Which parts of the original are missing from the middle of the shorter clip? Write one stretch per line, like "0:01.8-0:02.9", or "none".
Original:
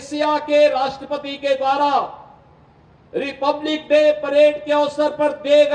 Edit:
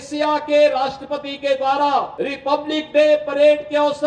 0:02.1-0:03.1